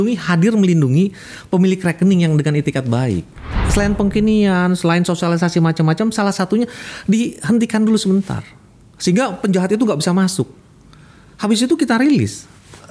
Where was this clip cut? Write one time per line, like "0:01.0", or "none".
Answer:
0:03.6